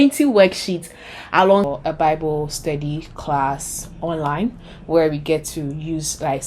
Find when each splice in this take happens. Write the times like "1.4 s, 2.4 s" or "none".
1.7 s